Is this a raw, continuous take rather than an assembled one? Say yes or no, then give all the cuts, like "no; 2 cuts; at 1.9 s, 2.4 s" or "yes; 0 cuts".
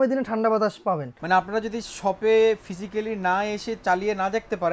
no; 1 cut; at 1.1 s